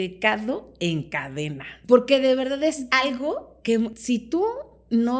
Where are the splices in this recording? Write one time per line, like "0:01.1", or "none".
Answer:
0:01.7
0:03.9